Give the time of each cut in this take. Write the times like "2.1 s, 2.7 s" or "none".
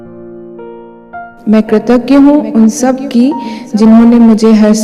1.4 s